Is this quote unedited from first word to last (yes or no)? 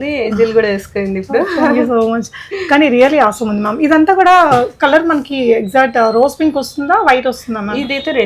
yes